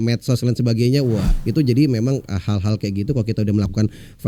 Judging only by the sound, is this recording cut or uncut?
cut